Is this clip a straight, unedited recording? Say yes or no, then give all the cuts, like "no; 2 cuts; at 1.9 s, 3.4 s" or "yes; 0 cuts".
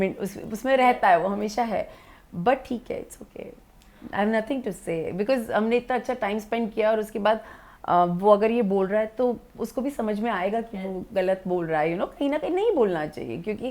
yes; 0 cuts